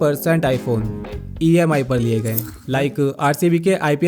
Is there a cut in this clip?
yes; 1 cut; at 2.5 s

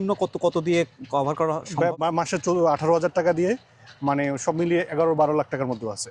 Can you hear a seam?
yes; 1 cut; at 2.0 s

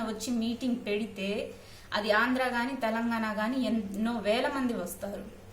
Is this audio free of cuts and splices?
yes; 0 cuts

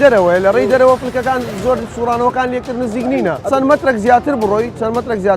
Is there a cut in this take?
yes; 1 cut; at 3.4 s

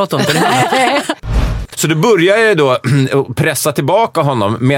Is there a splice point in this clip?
yes; 1 cut; at 1.5 s

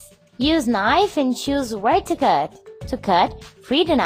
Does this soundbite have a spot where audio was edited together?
no; 0 cuts

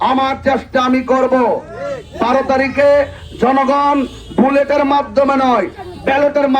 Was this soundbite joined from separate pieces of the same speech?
no; 0 cuts

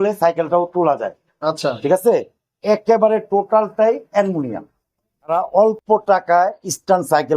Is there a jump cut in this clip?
yes; 1 cut; at 5.3 s

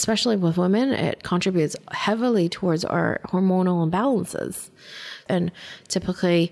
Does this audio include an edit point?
no; 0 cuts

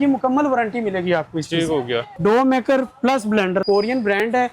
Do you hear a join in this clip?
yes; 2 cuts; at 2.1 s, 3.6 s

